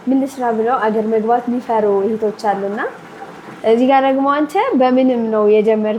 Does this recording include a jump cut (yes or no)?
no